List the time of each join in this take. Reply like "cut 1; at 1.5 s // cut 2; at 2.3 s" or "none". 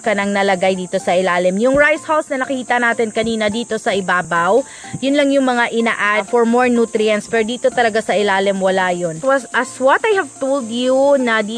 none